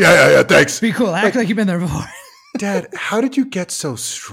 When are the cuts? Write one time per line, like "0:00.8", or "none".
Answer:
none